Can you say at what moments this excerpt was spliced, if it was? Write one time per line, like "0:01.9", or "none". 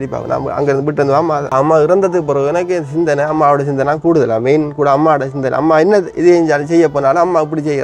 0:01.5